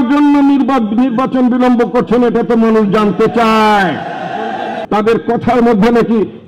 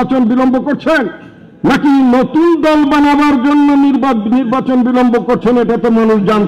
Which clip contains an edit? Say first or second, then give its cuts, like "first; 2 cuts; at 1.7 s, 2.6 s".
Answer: first; 1 cut; at 4.7 s